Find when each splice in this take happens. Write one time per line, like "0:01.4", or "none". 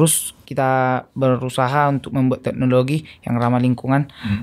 none